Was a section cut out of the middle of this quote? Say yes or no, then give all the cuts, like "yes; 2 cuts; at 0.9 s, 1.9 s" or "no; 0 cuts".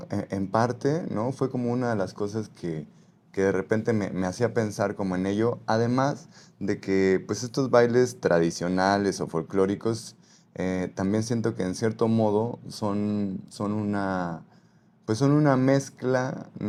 no; 0 cuts